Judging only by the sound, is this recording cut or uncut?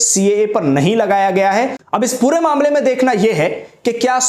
cut